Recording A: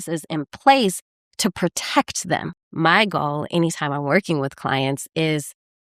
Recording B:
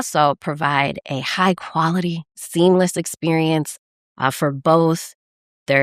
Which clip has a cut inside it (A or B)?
A